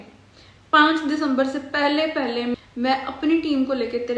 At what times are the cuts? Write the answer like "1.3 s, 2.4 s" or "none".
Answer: 2.5 s